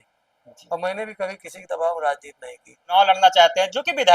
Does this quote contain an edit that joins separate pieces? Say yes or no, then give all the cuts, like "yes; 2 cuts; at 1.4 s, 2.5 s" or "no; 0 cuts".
yes; 1 cut; at 2.9 s